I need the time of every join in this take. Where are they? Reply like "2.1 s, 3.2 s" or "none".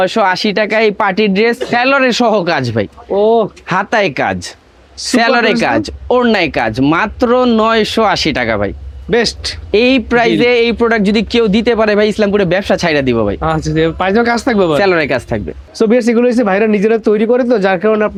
none